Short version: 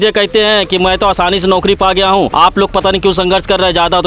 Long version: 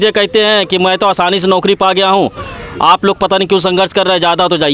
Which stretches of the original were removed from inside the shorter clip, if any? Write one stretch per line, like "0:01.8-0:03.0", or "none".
0:02.3-0:02.8